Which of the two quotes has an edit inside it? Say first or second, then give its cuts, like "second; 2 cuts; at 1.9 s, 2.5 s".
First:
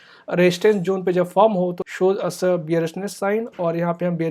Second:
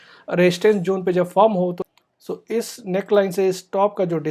second; 1 cut; at 1.9 s